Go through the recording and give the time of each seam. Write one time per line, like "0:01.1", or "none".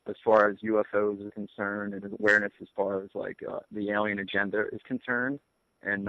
0:04.0